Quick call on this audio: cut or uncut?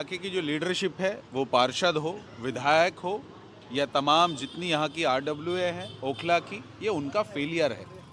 uncut